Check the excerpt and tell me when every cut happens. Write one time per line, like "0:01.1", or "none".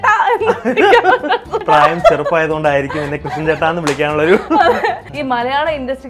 0:01.6
0:05.1